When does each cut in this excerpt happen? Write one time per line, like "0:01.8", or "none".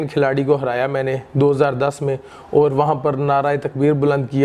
none